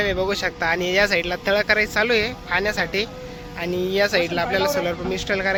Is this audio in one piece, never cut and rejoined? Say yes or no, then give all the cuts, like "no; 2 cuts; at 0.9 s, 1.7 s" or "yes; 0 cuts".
yes; 0 cuts